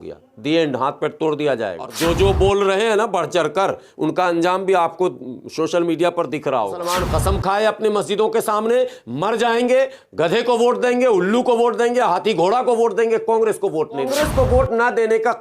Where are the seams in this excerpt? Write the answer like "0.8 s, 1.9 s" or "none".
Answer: 1.9 s, 6.8 s, 14.1 s